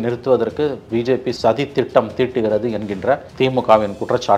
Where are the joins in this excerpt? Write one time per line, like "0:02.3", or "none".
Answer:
none